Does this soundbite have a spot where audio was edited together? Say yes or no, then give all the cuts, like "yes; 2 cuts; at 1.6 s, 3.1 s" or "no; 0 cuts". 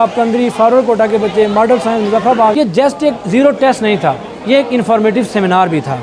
yes; 1 cut; at 2.5 s